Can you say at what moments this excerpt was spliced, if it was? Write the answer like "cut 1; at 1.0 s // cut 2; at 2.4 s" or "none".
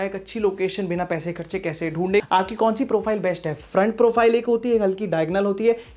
cut 1; at 2.2 s